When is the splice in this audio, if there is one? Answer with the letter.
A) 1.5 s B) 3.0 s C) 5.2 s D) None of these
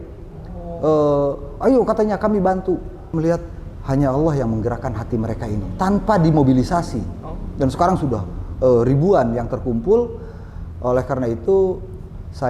B